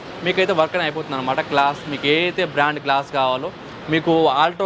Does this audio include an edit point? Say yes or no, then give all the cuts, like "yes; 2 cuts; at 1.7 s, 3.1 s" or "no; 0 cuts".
no; 0 cuts